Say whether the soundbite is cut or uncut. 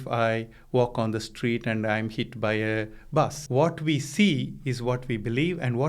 cut